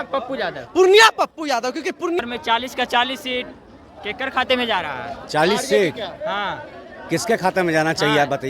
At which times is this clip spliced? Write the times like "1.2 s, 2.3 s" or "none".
2.2 s